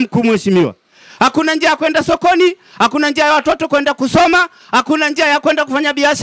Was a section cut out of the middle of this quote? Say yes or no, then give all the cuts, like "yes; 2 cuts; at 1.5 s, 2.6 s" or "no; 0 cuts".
no; 0 cuts